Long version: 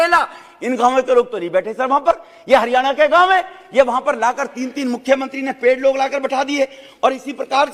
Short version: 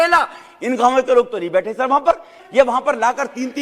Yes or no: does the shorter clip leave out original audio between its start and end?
yes